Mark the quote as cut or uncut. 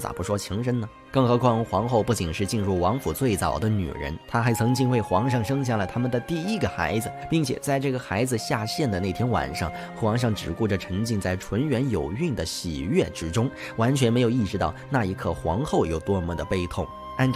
cut